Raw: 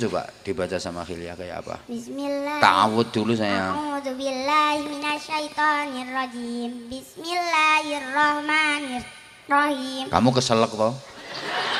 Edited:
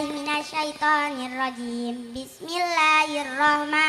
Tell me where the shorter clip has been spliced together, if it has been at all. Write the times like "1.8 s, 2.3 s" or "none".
none